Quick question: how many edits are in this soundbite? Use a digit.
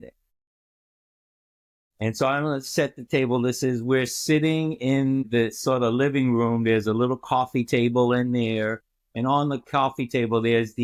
0